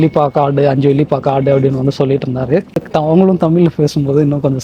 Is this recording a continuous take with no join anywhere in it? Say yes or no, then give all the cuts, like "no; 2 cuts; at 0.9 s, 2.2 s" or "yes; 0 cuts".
no; 1 cut; at 2.9 s